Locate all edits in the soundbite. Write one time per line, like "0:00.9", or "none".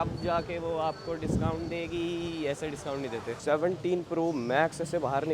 0:03.3